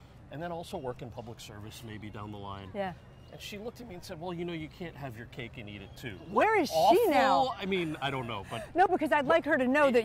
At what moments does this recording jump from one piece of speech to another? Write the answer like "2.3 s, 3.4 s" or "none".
6.3 s